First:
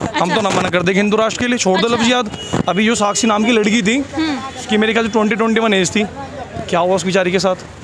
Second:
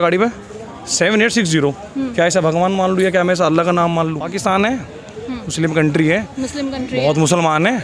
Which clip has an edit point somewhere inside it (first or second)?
second